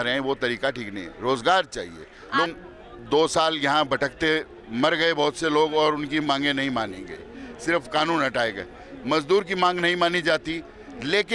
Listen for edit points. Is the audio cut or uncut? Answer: cut